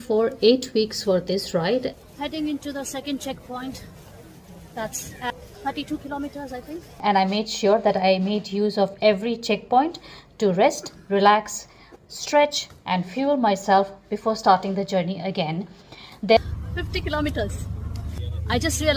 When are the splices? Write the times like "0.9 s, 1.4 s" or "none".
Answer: 2.0 s, 5.3 s, 6.9 s, 16.4 s